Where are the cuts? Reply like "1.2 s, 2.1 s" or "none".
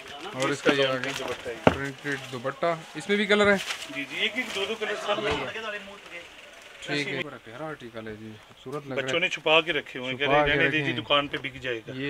7.2 s